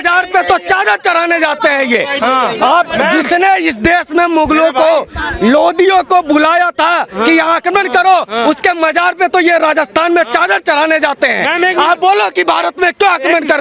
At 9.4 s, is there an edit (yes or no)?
no